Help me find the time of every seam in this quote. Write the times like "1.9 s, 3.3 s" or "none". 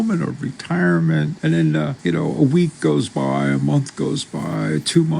2.0 s